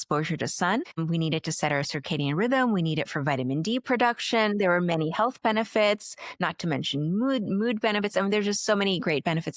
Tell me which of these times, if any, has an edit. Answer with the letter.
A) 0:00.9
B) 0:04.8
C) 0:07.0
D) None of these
A